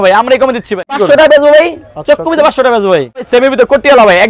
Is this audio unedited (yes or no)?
no